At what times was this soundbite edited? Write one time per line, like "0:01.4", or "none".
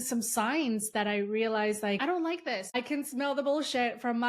0:02.2